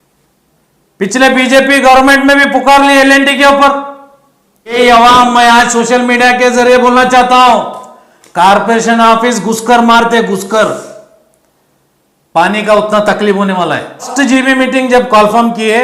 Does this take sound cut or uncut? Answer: cut